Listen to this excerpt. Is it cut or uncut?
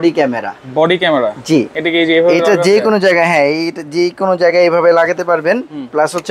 uncut